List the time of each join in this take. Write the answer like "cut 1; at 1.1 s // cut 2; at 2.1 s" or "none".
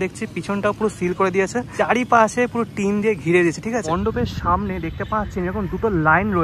cut 1; at 1.7 s // cut 2; at 3.9 s